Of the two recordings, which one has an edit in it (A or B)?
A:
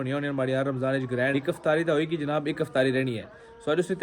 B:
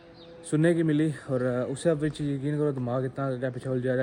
A